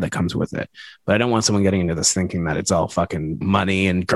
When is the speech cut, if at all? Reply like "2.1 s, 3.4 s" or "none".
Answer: none